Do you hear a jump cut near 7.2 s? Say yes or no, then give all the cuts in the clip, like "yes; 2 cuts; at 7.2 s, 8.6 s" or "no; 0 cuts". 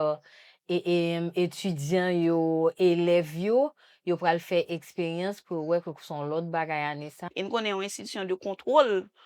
yes; 1 cut; at 7.2 s